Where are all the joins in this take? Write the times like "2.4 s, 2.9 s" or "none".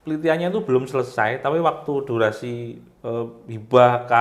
none

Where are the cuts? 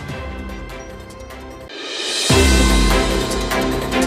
1.7 s

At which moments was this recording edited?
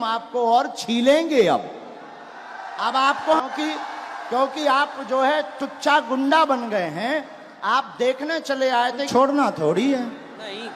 3.4 s, 9.1 s

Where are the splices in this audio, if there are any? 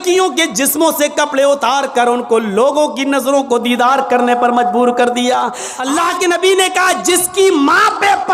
5.7 s

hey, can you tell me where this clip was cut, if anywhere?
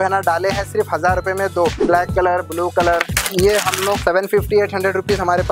1.8 s, 3.2 s, 4.0 s

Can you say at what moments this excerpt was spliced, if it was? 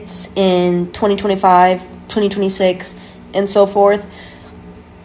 none

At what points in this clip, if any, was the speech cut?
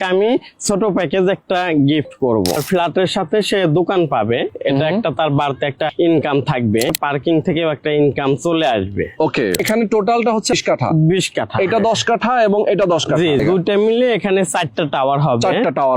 2.6 s, 5.9 s, 6.9 s, 9.6 s, 10.5 s, 13.4 s

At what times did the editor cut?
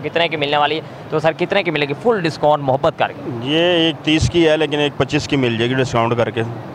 none

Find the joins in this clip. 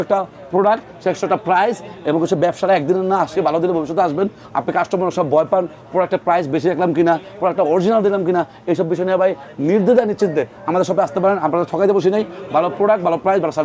none

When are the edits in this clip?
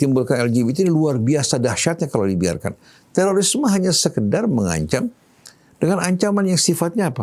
none

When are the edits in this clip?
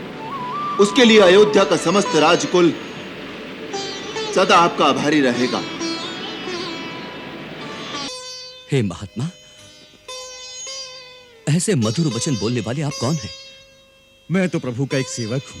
8.1 s

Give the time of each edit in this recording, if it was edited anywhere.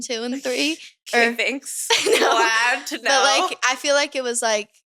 none

